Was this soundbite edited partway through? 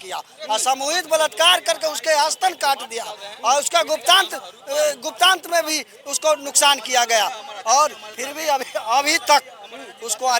no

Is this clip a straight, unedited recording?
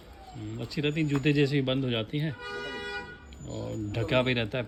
yes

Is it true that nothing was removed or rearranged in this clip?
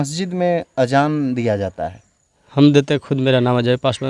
yes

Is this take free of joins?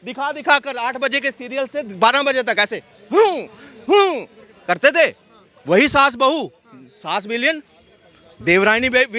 yes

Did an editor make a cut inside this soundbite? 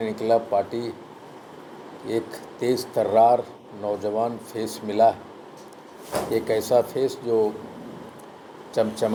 no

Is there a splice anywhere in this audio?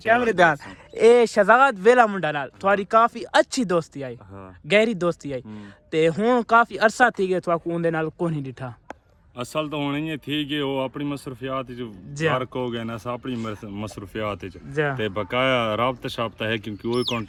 no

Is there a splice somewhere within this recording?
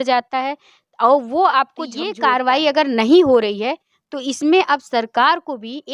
yes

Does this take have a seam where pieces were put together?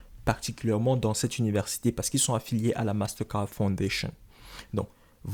no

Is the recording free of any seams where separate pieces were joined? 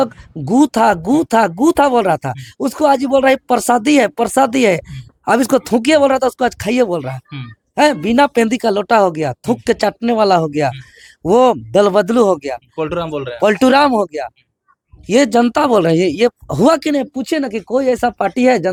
yes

